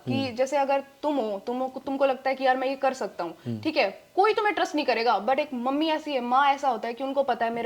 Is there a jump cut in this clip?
no; 0 cuts

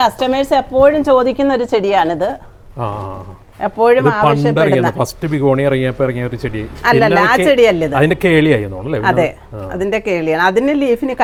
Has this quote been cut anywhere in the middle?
no; 0 cuts

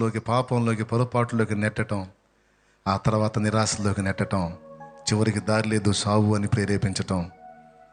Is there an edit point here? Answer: no; 0 cuts

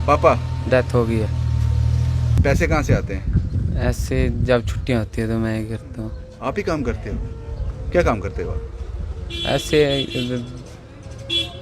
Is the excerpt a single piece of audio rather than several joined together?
no; 1 cut; at 2.4 s

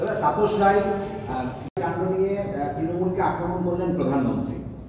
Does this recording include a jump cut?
yes; 1 cut; at 1.8 s

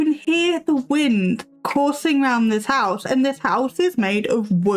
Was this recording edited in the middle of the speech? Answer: no; 0 cuts

